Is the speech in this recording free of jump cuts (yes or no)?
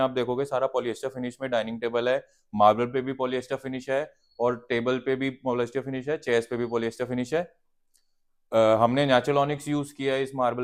yes